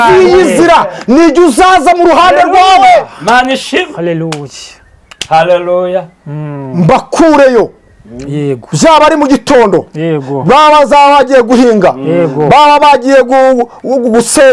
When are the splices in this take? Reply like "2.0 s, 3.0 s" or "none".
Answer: none